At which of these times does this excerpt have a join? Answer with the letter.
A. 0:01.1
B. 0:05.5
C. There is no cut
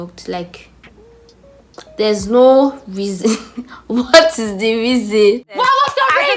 B